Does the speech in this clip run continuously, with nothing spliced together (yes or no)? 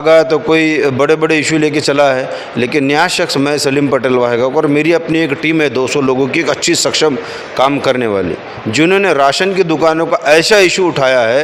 yes